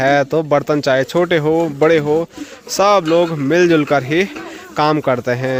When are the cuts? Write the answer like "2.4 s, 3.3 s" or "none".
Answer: none